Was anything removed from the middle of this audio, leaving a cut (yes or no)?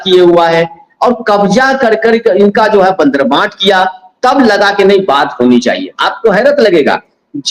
no